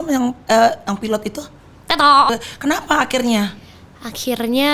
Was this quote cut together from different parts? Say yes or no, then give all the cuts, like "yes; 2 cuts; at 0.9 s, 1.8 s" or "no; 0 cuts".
yes; 1 cut; at 2.3 s